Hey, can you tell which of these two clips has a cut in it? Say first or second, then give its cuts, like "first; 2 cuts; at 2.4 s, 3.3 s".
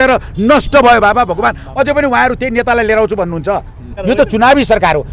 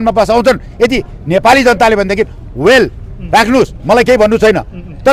first; 1 cut; at 3.8 s